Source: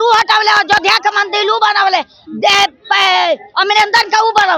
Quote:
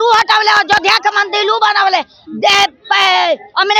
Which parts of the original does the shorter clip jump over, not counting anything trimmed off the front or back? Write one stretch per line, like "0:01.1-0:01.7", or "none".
none